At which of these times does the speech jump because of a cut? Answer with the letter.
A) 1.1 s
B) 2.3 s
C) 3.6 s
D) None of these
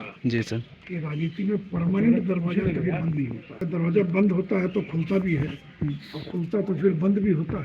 C